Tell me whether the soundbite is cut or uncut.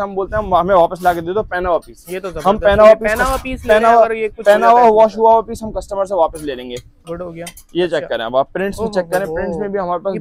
uncut